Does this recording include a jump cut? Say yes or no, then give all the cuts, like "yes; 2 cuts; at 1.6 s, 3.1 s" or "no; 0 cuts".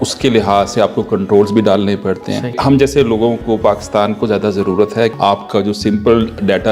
yes; 2 cuts; at 2.6 s, 5.1 s